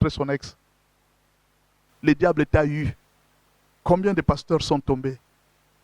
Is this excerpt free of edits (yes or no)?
no